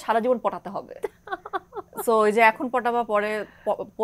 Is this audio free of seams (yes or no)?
yes